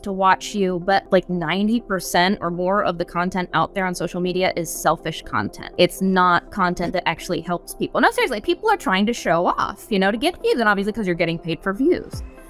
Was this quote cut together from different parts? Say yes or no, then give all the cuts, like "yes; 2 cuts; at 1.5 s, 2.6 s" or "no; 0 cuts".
yes; 2 cuts; at 1.1 s, 5.6 s